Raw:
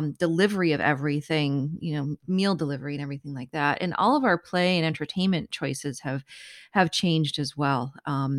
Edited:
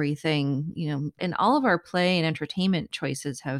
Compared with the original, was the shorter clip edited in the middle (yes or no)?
yes